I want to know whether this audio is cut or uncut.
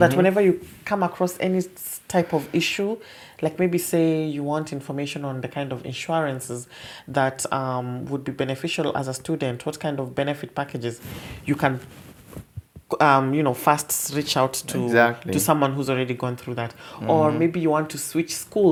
uncut